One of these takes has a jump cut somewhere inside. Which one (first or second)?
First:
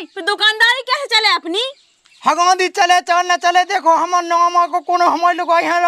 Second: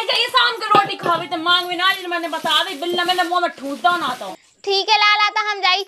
second